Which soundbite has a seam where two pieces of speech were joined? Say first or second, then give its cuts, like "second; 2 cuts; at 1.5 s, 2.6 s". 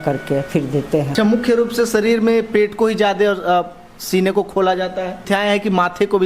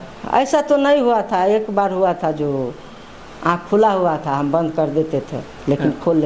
first; 2 cuts; at 1.1 s, 5.2 s